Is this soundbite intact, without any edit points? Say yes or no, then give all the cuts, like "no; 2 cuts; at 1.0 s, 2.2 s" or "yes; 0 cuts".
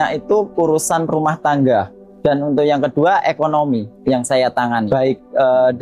no; 3 cuts; at 2.0 s, 3.9 s, 4.9 s